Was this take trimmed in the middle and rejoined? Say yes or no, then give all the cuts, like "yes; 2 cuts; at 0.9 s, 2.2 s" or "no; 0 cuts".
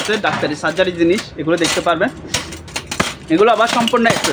no; 0 cuts